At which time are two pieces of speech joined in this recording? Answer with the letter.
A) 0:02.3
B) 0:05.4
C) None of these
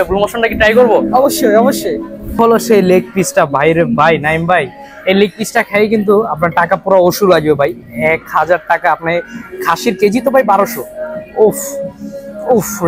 A